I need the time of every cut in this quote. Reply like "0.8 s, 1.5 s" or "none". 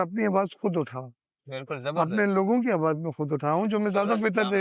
none